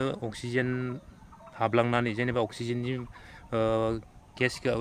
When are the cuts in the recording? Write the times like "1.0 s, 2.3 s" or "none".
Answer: none